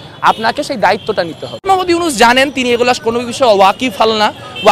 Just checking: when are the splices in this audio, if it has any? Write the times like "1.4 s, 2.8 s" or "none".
1.5 s